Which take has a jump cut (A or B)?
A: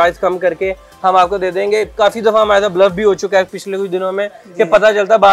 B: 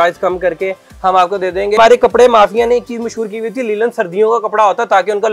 B